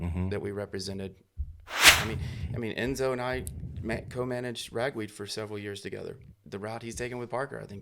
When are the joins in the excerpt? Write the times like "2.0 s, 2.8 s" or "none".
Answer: 1.8 s, 6.3 s